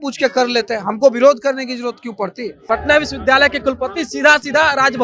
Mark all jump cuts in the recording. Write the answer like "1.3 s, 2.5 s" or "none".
2.6 s